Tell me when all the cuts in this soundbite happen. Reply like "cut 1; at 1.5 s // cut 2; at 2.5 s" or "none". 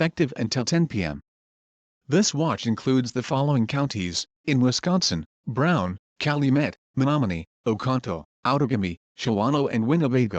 cut 1; at 5.2 s // cut 2; at 9.5 s